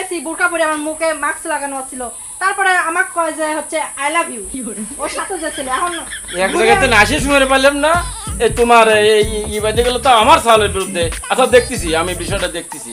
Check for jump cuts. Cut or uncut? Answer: uncut